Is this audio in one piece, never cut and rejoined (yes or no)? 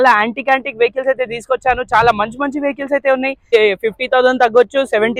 no